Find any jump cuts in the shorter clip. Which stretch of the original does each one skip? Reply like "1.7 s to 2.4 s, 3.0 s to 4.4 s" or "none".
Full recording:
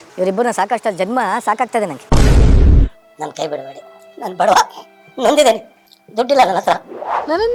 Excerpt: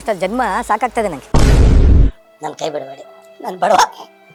none